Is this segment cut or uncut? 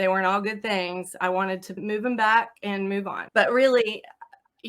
cut